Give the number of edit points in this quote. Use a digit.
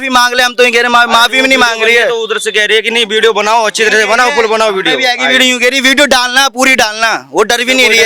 0